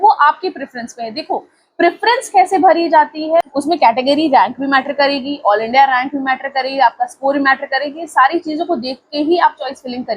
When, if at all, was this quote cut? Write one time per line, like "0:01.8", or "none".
0:03.5